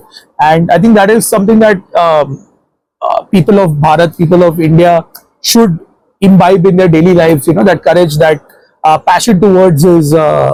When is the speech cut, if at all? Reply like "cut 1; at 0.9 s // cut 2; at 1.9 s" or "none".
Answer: none